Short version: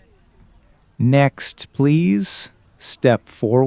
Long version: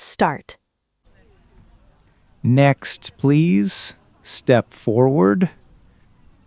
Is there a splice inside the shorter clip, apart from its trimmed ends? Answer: yes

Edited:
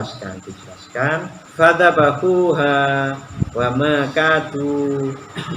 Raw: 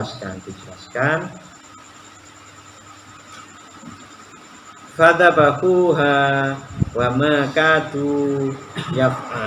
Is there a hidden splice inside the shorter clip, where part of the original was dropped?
yes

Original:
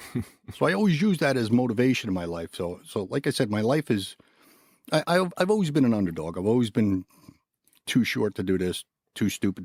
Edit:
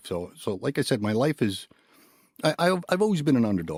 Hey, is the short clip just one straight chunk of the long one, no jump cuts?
yes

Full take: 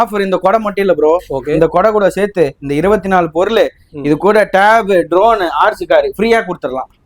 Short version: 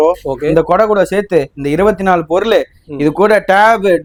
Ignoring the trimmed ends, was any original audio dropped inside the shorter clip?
no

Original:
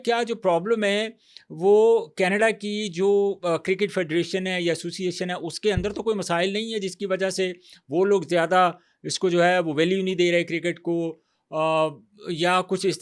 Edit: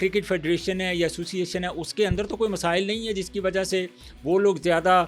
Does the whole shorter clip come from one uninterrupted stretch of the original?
yes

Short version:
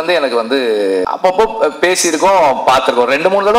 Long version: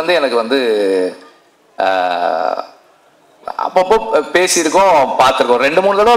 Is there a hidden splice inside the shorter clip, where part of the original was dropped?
yes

